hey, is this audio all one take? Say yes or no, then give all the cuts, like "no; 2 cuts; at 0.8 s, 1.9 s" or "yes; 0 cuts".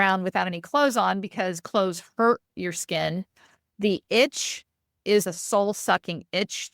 no; 1 cut; at 5.3 s